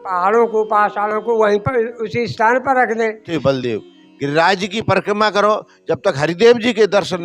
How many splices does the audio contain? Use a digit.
1